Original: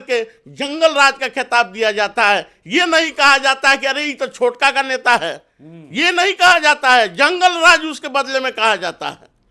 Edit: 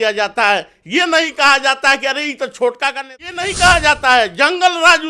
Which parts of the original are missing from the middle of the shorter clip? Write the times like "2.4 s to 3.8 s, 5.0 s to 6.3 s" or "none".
4.9 s to 5.9 s